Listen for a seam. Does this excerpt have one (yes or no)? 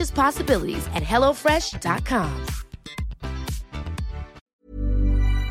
yes